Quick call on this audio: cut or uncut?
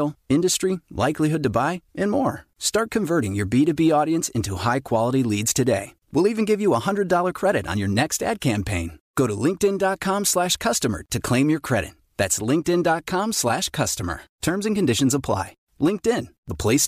uncut